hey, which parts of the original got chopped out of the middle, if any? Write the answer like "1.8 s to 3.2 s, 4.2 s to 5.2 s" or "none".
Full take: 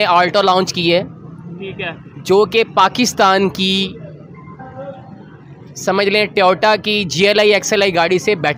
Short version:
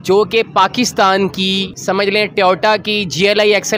3.9 s to 5.7 s

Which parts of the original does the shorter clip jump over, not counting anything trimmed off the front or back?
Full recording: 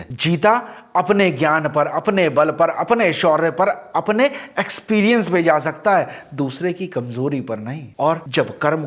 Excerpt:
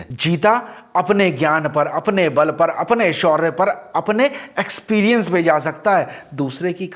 none

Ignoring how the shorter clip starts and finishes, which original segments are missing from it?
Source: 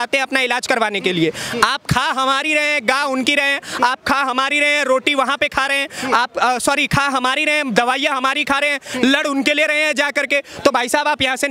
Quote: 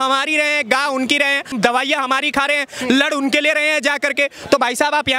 3.7 s to 7.6 s

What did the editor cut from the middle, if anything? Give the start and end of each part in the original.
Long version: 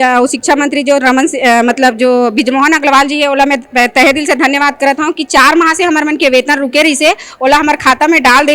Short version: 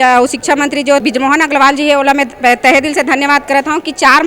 1.0 s to 2.3 s

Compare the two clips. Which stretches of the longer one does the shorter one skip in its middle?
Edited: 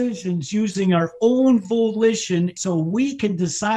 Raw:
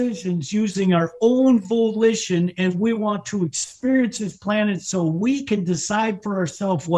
2.5 s to 4.8 s

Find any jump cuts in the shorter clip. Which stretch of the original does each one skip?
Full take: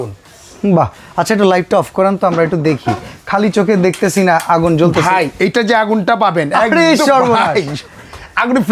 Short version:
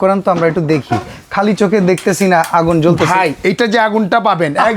none

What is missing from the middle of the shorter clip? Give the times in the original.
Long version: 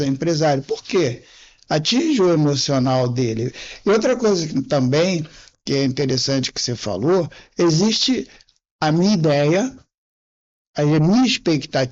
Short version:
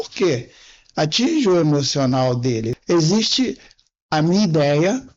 3.5 s to 7.4 s

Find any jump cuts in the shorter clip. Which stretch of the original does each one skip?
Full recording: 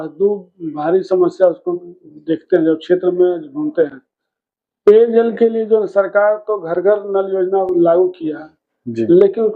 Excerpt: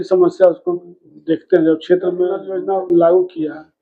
3.5 s to 7.3 s

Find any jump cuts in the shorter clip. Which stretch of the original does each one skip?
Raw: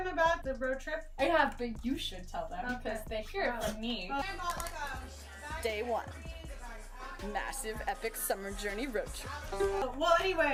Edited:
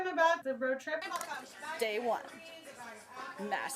1.1 s to 4.9 s

